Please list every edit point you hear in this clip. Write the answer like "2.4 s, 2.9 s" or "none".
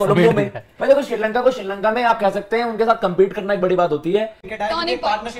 4.4 s